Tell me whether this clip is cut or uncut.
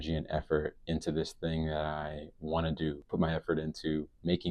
cut